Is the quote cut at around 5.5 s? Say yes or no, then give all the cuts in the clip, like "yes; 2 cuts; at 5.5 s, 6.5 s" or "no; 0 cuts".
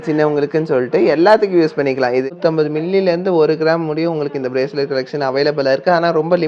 no; 1 cut; at 2.3 s